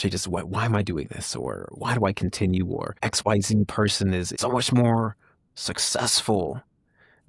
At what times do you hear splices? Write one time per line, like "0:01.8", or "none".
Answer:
0:01.7
0:02.9
0:04.3